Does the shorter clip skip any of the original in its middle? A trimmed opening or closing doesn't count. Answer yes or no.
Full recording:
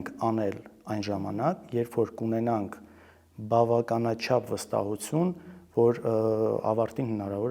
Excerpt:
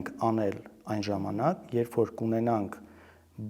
no